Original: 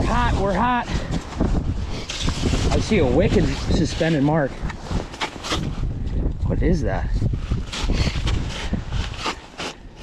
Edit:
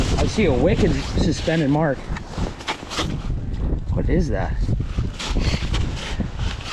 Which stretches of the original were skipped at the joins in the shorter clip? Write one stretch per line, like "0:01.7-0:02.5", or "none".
none